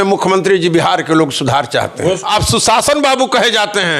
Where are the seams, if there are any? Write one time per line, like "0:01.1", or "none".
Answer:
0:02.2